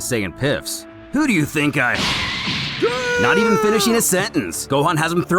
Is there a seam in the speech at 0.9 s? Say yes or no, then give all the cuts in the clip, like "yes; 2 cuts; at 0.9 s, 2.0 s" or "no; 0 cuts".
no; 0 cuts